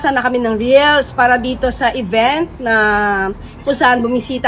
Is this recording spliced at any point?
no; 0 cuts

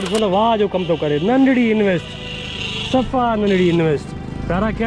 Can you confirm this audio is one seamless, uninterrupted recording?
yes; 0 cuts

